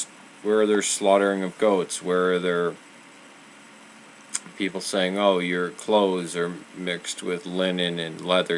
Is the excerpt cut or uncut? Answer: uncut